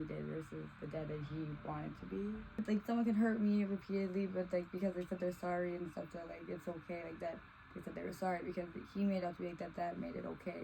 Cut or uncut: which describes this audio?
cut